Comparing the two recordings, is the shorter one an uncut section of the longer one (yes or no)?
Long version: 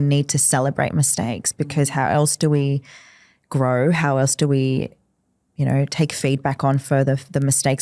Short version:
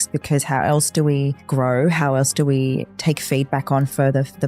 no